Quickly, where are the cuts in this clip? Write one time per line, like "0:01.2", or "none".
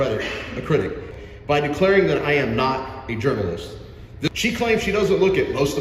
0:01.1
0:04.1